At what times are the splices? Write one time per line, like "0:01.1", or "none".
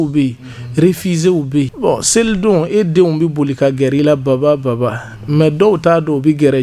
0:01.7